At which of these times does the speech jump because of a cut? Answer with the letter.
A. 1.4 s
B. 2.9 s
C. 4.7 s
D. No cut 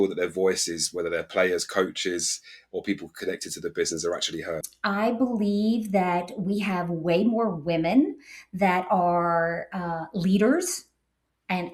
C